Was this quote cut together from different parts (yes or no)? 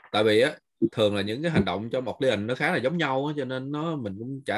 no